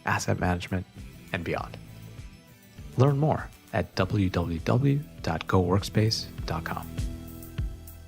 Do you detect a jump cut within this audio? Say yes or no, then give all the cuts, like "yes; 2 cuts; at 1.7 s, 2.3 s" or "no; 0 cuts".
yes; 1 cut; at 6.8 s